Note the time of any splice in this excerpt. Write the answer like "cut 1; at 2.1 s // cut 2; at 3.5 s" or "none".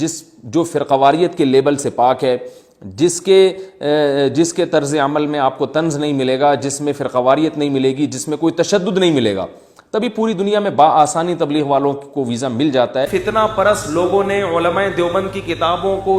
cut 1; at 13.1 s